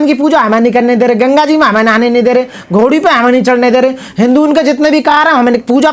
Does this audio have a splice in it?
no; 0 cuts

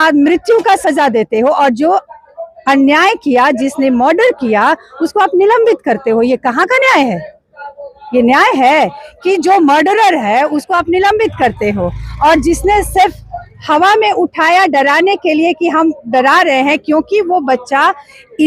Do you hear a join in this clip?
no; 0 cuts

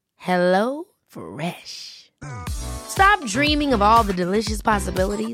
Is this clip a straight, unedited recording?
yes; 0 cuts

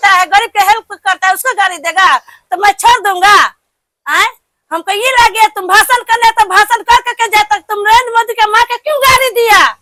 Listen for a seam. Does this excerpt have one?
no; 0 cuts

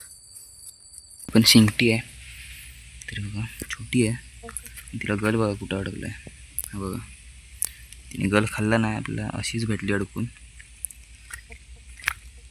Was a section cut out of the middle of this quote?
yes; 1 cut; at 1.2 s

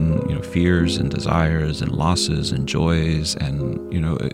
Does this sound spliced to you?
no; 0 cuts

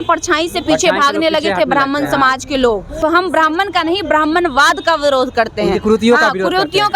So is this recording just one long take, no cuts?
no; 1 cut; at 2.9 s

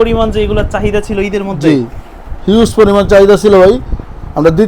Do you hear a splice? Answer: no; 0 cuts

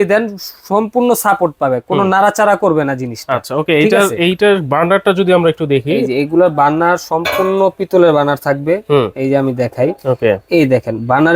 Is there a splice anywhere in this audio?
no; 0 cuts

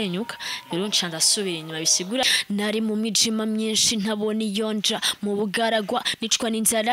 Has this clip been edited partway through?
yes; 1 cut; at 2.2 s

